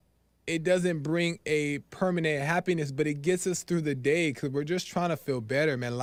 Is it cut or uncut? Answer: uncut